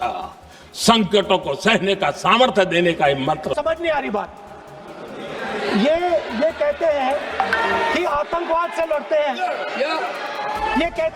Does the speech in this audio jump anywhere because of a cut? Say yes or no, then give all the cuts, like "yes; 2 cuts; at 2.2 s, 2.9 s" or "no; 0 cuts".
yes; 1 cut; at 3.6 s